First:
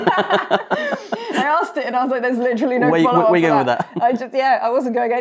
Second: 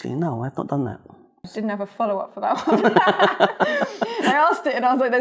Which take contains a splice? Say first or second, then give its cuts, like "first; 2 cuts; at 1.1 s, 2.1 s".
second; 1 cut; at 1.5 s